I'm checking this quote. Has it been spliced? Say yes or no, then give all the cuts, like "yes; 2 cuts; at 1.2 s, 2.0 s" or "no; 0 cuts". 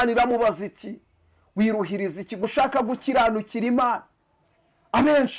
yes; 1 cut; at 2.4 s